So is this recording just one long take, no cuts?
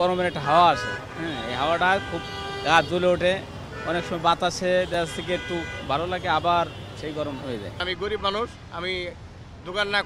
yes; 0 cuts

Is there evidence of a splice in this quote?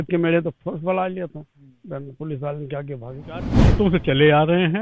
yes; 1 cut; at 3.6 s

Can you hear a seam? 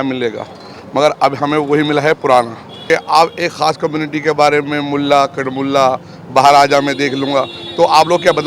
yes; 1 cut; at 2.7 s

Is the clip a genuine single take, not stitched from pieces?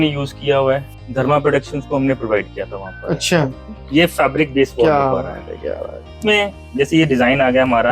no; 3 cuts; at 1.0 s, 3.6 s, 6.2 s

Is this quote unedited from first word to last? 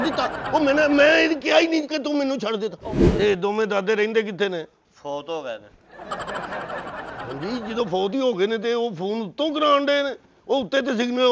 no; 1 cut; at 3.0 s

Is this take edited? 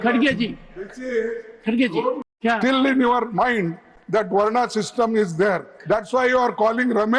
yes; 1 cut; at 2.2 s

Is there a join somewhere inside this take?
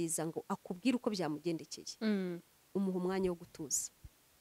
no; 0 cuts

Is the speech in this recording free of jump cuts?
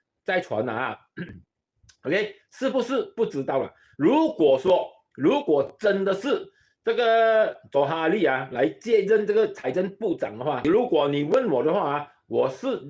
no; 1 cut; at 10.6 s

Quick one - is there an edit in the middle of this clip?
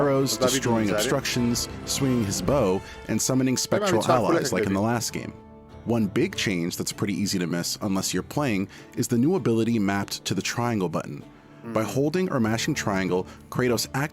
yes; 3 cuts; at 4.5 s, 7.8 s, 11.7 s

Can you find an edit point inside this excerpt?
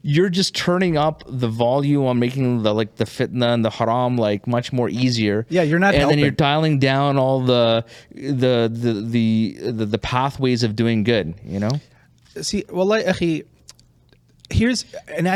no; 0 cuts

